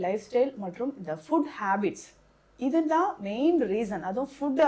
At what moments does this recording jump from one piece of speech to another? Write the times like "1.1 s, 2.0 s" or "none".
none

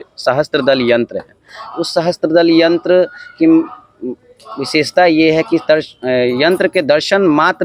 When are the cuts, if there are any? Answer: none

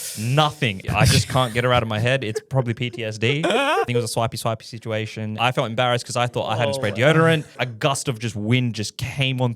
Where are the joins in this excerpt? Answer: 0.8 s, 3.9 s, 5.3 s, 7.6 s

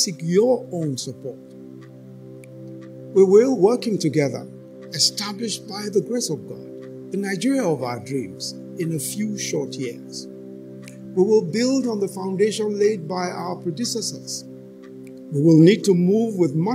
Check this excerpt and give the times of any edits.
none

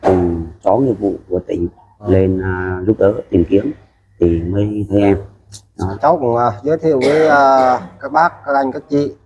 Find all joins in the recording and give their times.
6.0 s

